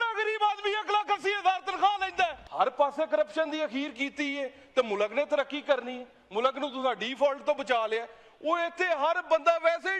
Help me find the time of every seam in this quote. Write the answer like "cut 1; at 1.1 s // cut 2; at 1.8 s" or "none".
cut 1; at 2.4 s